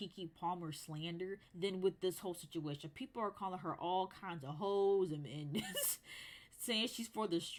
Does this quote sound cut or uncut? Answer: uncut